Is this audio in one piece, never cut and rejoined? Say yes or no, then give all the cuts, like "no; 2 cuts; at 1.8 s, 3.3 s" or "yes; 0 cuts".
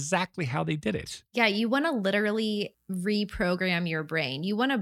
no; 1 cut; at 2.8 s